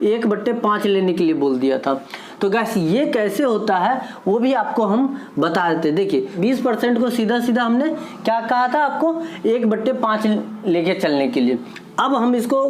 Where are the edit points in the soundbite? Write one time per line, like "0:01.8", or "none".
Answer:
0:06.4